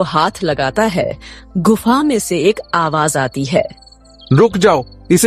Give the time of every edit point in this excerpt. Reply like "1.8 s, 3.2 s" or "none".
none